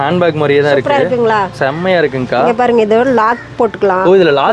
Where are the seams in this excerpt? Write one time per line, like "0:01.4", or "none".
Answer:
none